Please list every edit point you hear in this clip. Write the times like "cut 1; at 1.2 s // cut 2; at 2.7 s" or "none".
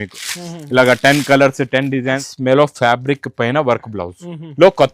cut 1; at 2.3 s

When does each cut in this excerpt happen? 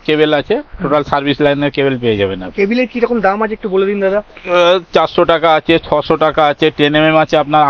none

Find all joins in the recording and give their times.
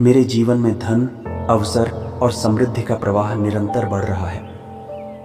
cut 1; at 4.3 s

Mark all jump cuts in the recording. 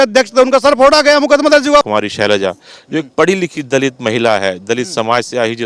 cut 1; at 1.9 s

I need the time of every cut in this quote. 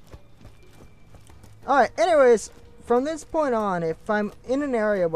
none

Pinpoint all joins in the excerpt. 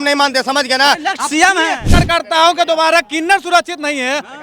cut 1; at 1.9 s

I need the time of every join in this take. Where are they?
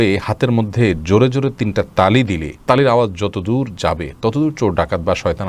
none

